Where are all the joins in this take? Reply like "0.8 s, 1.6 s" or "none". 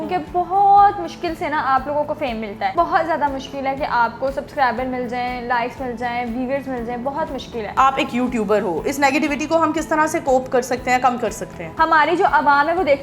2.7 s, 7.8 s, 11.6 s